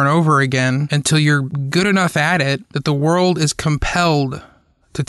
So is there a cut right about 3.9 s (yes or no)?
no